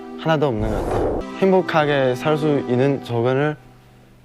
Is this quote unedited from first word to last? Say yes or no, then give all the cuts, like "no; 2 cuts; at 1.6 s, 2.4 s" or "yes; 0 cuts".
no; 1 cut; at 1.3 s